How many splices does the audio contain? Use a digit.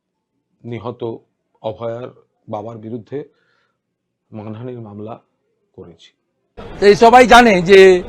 1